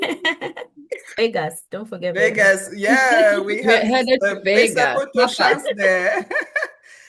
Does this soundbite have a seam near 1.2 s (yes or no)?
yes